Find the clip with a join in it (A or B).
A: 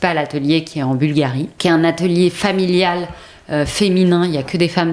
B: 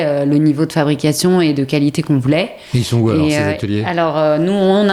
A